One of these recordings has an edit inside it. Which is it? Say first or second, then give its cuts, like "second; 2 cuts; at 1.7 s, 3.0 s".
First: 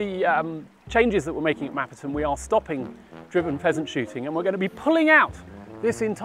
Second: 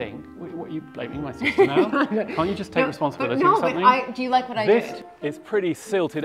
second; 1 cut; at 4.9 s